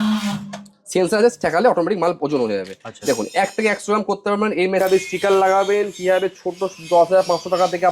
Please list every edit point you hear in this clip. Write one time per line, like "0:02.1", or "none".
0:04.8